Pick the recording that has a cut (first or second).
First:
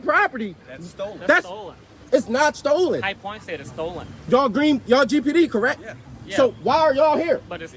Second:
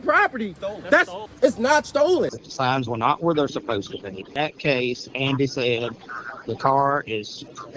second